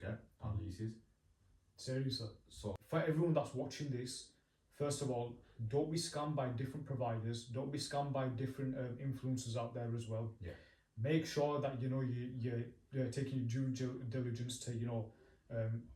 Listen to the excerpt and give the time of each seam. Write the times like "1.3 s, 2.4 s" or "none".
2.8 s